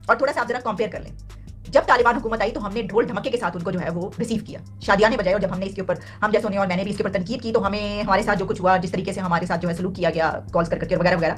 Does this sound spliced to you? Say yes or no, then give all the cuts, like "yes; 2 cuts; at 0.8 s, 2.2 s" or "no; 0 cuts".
no; 0 cuts